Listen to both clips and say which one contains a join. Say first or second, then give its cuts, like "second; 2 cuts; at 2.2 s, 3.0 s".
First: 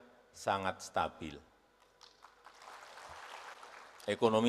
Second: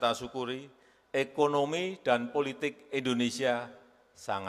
first; 1 cut; at 3.5 s